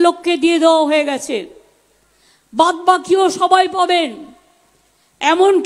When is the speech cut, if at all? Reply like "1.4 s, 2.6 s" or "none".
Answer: none